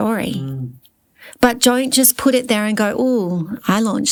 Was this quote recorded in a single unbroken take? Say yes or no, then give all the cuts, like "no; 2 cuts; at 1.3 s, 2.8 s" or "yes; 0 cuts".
yes; 0 cuts